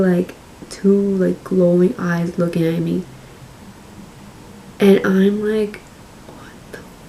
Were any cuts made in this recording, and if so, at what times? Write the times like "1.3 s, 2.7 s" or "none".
none

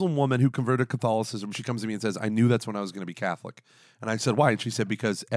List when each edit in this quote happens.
1.6 s

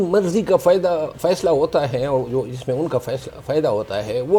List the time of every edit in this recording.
none

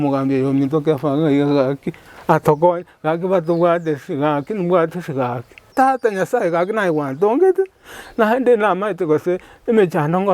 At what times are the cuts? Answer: 5.6 s

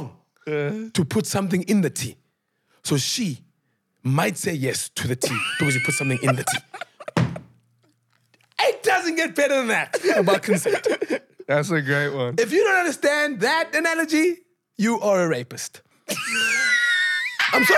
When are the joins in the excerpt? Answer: none

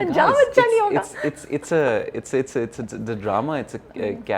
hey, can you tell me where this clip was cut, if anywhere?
none

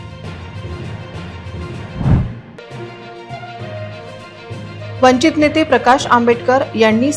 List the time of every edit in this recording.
2.2 s

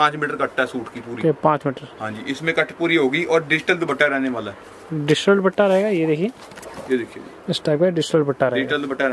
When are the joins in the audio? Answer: none

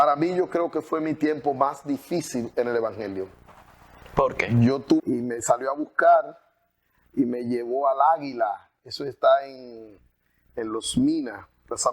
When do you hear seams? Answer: 5.0 s

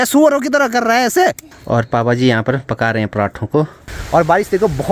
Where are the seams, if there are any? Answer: 1.6 s, 3.9 s

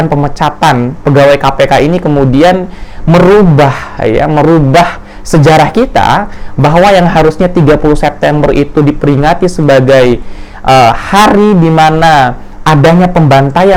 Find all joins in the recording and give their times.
none

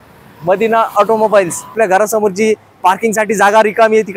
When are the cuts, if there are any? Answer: 1.7 s

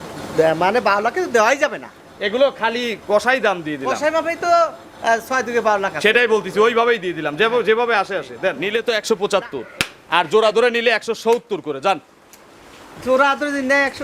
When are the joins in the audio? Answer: 8.6 s

